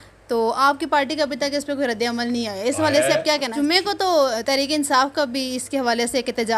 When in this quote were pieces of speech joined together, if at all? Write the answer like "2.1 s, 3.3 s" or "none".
3.5 s